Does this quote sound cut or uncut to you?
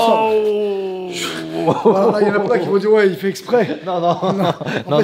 uncut